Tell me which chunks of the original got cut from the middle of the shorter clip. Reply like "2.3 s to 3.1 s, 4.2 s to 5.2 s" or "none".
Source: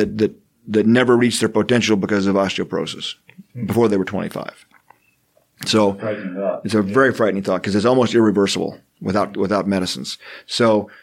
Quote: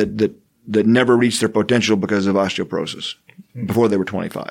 none